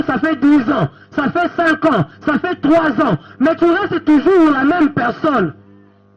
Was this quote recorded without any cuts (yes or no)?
yes